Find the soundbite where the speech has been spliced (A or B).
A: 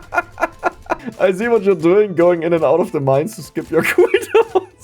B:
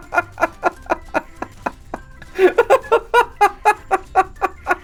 A